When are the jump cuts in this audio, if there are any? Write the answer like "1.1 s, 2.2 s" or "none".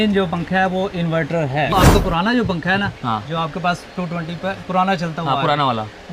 1.7 s

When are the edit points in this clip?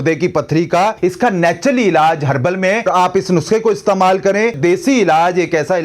1.0 s, 2.9 s, 4.6 s

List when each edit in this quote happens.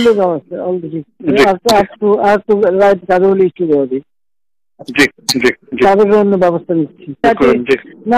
7.2 s

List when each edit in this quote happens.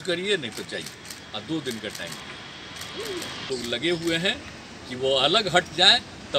3.5 s

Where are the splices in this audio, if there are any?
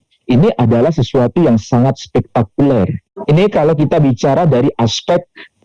3.1 s

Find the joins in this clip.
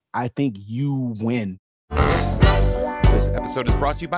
1.6 s

